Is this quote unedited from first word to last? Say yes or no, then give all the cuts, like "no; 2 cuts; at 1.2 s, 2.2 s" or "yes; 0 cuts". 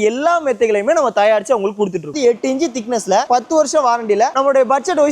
no; 2 cuts; at 2.1 s, 3.3 s